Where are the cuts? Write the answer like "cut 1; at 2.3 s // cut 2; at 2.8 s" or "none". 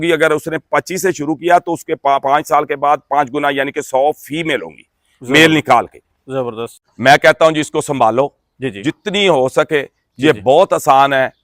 cut 1; at 6.7 s